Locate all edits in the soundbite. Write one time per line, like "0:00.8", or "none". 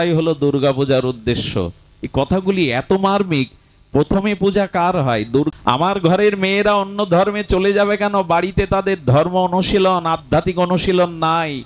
0:05.5